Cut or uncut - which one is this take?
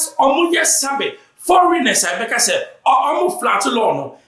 uncut